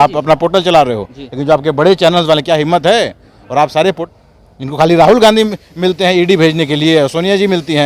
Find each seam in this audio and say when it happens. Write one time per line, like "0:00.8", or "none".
0:04.0

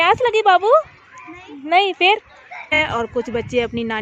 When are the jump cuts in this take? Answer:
0:02.8

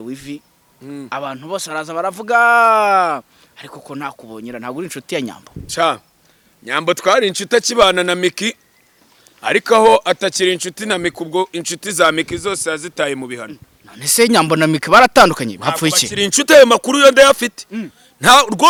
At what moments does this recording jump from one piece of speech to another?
none

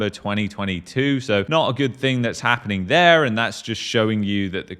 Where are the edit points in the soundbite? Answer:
none

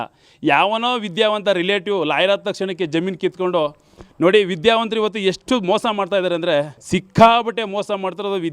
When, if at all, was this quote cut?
0:06.8

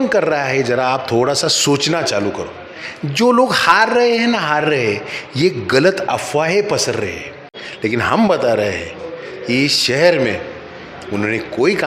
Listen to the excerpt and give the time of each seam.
0:07.6

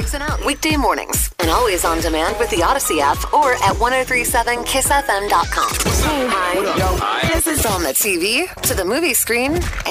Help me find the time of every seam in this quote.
0:05.8

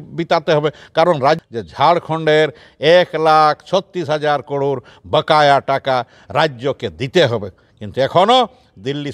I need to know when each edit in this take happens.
0:01.4

